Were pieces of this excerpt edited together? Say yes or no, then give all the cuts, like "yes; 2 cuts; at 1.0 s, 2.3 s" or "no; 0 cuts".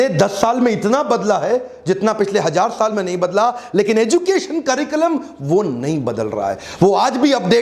no; 0 cuts